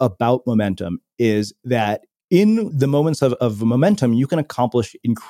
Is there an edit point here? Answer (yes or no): no